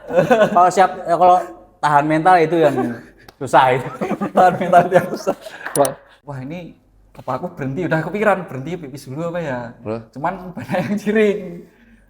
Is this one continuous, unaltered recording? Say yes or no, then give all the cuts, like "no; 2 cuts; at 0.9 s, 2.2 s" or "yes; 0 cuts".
no; 1 cut; at 6.2 s